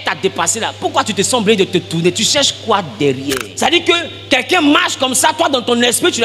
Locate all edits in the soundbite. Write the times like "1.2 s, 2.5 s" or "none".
3.5 s